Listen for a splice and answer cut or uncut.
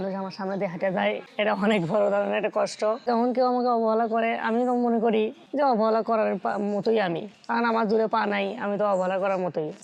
uncut